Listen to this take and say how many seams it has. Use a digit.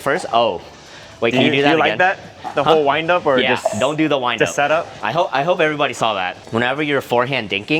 2